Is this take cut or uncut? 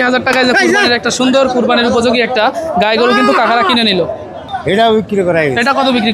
cut